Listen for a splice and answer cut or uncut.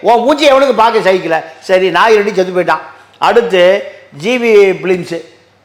uncut